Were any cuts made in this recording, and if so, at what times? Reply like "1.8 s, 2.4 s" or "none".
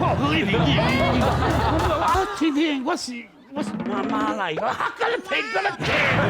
2.1 s